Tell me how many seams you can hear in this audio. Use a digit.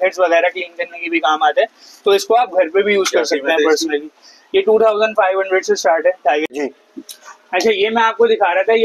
1